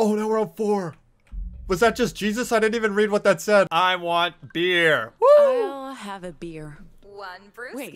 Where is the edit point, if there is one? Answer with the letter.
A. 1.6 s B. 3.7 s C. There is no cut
B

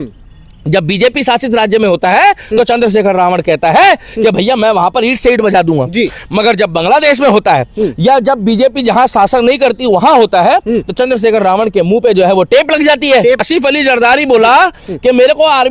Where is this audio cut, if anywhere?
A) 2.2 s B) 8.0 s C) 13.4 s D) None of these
C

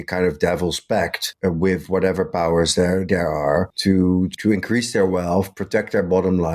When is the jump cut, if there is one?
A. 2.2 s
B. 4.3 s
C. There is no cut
B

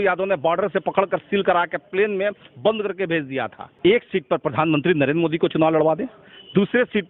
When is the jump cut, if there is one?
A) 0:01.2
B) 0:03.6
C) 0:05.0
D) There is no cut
B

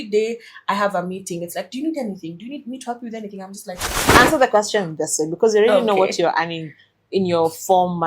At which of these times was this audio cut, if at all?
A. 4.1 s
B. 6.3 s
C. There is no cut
A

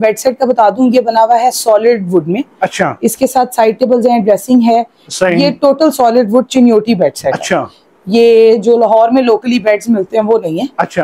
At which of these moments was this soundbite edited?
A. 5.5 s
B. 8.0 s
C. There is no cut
C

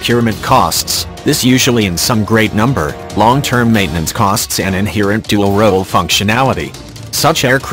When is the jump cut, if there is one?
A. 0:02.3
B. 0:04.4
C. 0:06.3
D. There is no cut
C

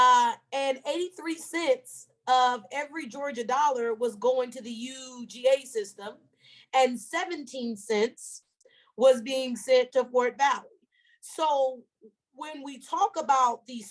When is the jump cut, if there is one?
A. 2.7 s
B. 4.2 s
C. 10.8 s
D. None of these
D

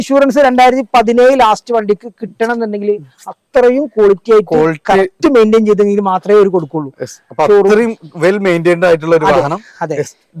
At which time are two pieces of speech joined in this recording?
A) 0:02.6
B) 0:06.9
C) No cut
C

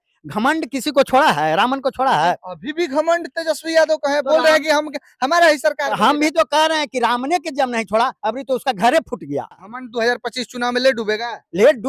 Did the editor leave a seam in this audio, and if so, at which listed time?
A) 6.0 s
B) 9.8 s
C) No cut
B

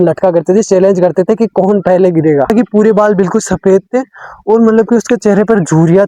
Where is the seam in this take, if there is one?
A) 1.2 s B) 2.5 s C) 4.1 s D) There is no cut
B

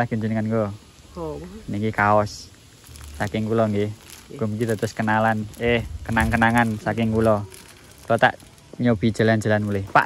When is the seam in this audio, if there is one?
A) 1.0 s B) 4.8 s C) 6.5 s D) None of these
D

